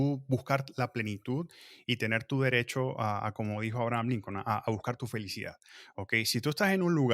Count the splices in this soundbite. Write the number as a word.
zero